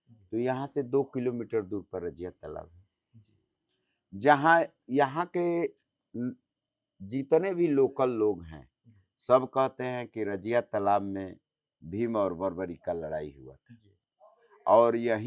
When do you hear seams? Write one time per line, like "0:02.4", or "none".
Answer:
none